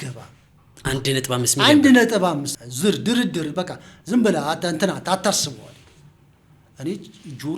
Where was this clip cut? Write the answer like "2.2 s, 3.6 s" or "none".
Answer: 2.5 s